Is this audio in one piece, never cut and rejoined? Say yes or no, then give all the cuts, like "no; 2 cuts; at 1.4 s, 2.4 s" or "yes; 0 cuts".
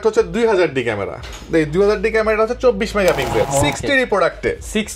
no; 1 cut; at 3.5 s